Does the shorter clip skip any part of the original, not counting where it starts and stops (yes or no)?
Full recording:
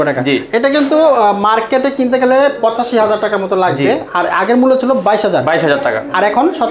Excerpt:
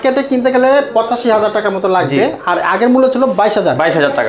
no